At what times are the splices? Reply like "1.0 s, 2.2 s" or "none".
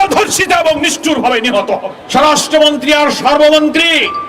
2.0 s